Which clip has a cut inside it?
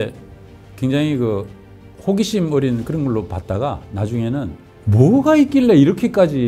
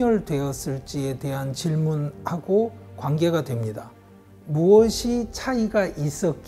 first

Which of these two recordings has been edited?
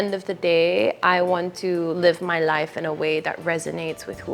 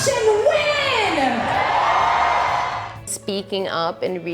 second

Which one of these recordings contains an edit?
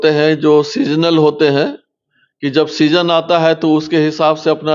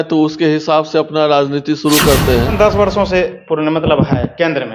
second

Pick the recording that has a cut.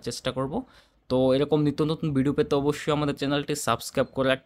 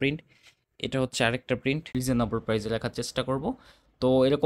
second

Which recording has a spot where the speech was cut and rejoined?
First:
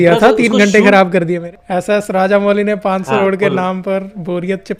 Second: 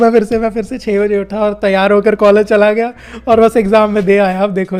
first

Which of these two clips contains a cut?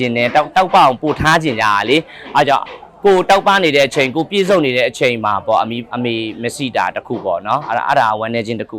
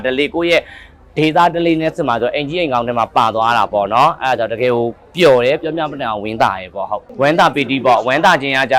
second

